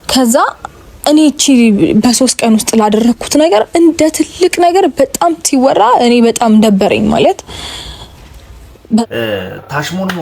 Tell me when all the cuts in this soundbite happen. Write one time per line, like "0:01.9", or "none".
0:09.0